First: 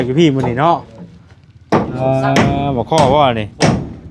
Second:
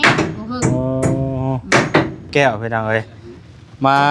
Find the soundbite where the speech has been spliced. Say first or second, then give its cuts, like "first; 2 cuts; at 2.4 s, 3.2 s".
second; 1 cut; at 2.3 s